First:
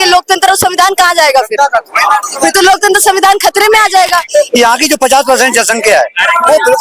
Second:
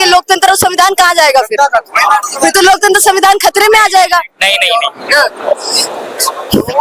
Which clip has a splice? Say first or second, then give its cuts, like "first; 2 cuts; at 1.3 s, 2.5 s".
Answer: first; 1 cut; at 4.3 s